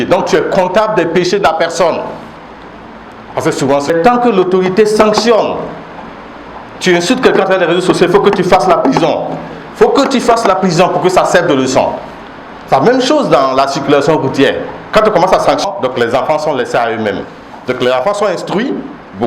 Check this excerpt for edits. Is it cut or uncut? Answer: cut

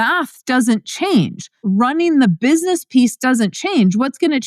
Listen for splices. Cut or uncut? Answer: cut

